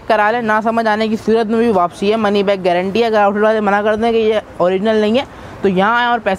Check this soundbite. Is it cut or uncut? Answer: uncut